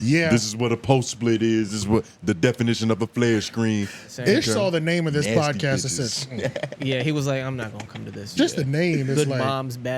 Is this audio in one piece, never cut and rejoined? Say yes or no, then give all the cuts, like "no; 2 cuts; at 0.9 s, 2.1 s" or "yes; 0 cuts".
no; 1 cut; at 4.1 s